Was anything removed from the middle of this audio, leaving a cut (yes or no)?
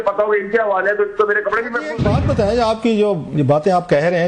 yes